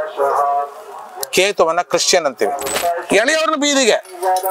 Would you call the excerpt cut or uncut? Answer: cut